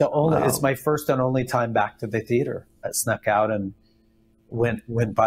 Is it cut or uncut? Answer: cut